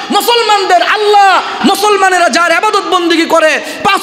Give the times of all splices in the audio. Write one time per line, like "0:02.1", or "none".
0:01.5